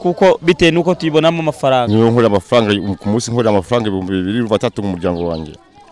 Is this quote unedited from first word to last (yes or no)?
no